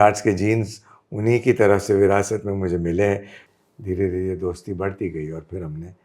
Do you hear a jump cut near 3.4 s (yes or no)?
yes